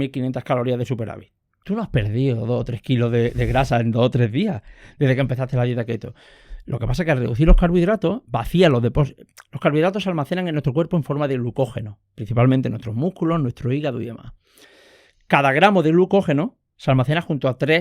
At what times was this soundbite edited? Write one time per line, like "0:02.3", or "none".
0:01.5